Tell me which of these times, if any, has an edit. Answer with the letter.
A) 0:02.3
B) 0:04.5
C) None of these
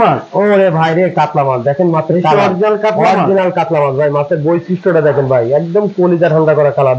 C